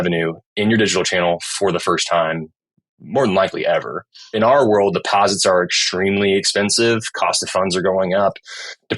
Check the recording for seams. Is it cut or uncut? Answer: cut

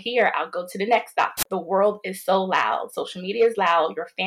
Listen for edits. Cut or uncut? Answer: cut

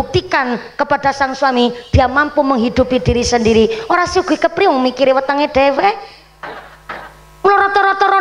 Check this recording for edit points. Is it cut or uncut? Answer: uncut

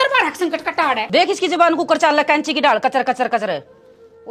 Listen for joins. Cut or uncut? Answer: cut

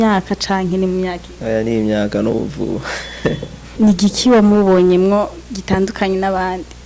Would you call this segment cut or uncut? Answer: cut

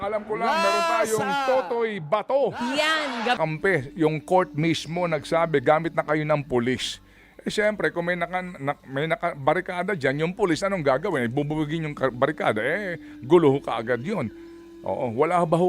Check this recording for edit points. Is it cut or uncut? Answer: cut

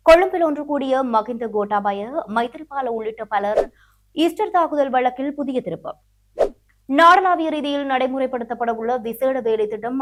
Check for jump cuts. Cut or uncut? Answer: uncut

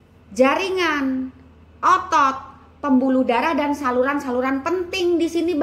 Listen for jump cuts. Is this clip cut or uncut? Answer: uncut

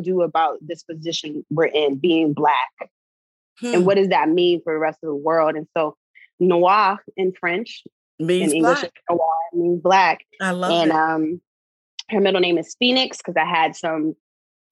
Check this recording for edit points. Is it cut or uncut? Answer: uncut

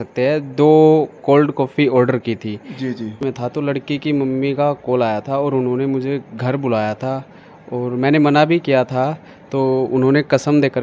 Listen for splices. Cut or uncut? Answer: cut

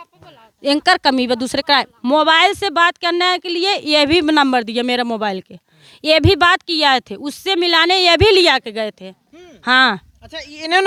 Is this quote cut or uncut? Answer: uncut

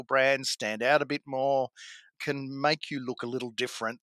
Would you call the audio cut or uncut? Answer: cut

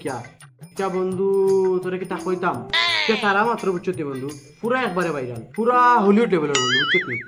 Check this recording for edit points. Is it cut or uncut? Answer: uncut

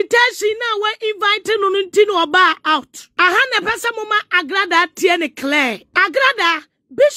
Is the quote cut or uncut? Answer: cut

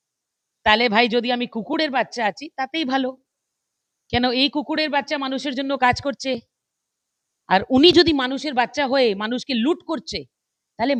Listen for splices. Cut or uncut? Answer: uncut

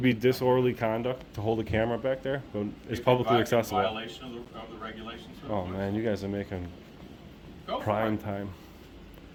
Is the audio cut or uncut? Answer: uncut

